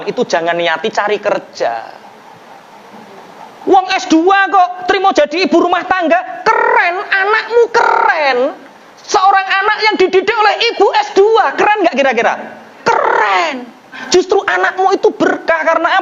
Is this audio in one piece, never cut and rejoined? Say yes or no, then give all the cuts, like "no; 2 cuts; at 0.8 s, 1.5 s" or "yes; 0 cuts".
no; 1 cut; at 14.0 s